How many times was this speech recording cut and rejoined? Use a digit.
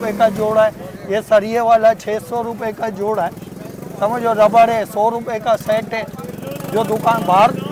0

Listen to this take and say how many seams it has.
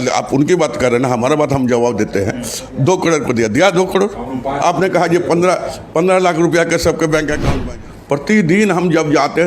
1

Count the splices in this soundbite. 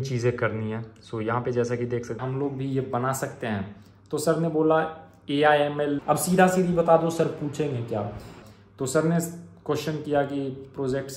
3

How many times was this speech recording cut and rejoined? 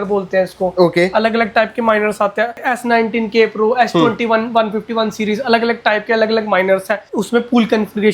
2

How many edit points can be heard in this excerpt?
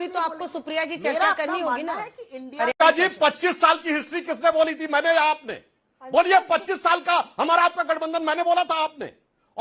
1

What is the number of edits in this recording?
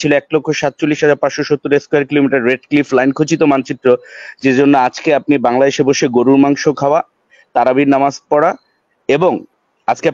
0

